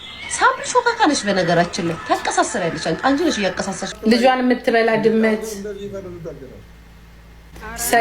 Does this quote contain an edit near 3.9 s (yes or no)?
yes